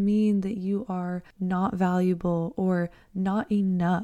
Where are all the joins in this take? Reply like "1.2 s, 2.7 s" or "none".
1.2 s